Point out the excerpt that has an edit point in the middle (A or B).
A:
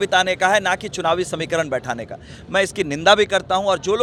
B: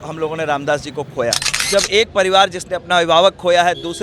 B